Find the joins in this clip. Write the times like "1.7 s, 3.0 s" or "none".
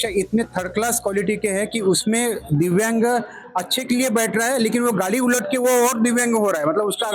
none